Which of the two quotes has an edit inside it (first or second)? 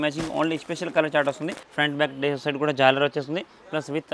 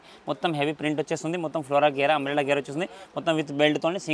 first